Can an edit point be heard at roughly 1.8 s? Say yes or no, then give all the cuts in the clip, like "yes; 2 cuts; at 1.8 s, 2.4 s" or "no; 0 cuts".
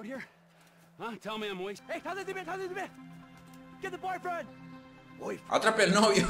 yes; 1 cut; at 1.8 s